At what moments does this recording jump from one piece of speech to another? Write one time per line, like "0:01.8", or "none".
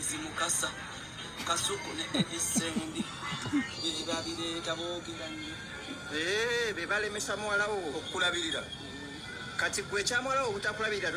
none